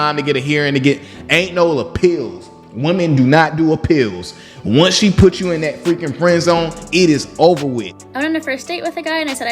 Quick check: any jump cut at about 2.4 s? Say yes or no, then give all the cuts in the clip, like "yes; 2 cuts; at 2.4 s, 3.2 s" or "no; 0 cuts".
no; 1 cut; at 8.0 s